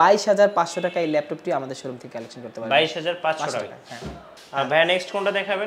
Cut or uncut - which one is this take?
uncut